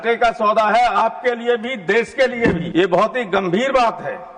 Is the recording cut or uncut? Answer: cut